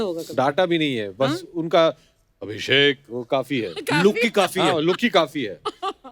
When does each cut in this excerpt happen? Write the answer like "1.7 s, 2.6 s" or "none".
none